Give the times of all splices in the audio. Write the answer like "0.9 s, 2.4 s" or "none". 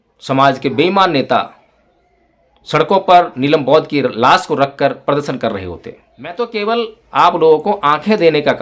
6.3 s